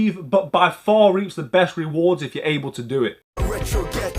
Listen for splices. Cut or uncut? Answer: cut